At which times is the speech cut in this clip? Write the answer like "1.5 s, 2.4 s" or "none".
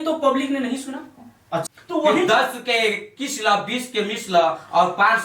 1.6 s